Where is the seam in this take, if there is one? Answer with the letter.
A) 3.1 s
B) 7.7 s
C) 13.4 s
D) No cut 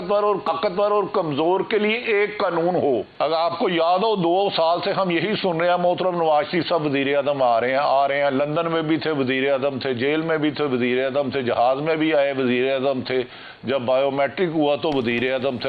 A